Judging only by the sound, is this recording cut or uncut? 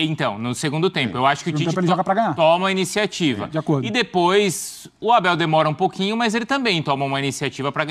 uncut